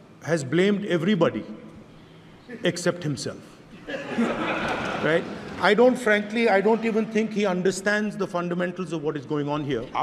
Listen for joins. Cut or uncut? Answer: uncut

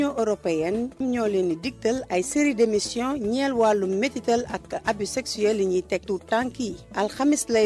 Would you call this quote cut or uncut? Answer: cut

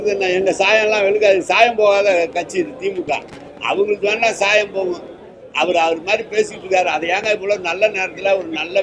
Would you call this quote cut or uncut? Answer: uncut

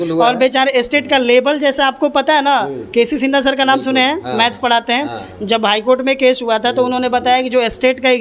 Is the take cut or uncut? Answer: uncut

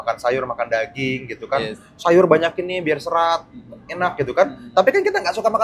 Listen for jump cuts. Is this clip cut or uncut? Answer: uncut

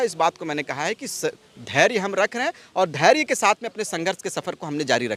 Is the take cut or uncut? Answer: uncut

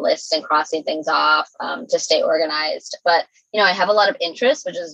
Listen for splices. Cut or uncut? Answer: uncut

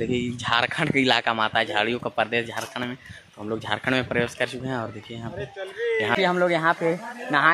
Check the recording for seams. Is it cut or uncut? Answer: cut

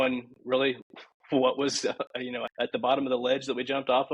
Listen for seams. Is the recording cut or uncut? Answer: cut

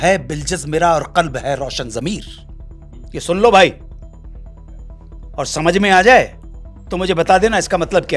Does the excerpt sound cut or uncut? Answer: uncut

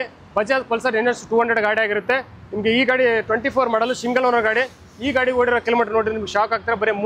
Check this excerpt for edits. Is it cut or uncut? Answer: uncut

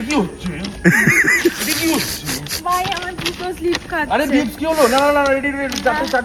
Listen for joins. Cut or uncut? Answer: uncut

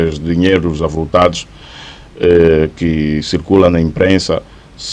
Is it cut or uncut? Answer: uncut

